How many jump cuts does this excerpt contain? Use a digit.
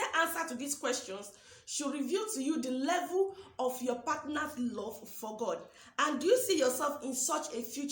0